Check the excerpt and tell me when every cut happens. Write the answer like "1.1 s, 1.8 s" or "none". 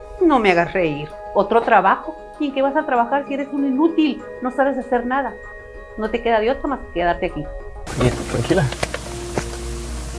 7.8 s